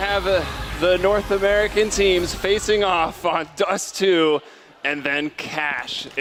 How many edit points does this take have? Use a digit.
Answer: 0